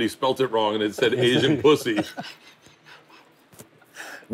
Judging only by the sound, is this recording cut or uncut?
uncut